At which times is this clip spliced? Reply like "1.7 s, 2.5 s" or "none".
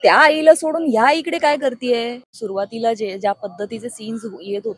2.3 s